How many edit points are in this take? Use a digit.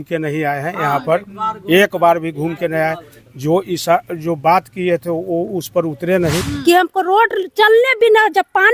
1